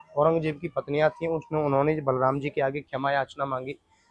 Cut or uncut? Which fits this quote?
uncut